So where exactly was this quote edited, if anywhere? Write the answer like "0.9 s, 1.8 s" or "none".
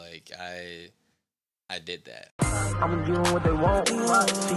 2.2 s